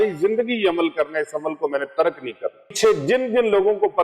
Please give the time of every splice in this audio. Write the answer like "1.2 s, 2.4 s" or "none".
2.7 s